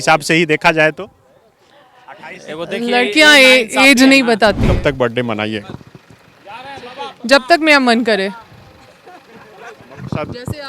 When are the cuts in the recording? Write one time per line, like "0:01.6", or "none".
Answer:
0:04.8